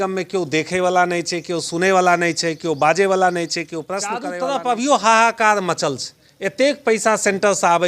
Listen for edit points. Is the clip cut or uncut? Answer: cut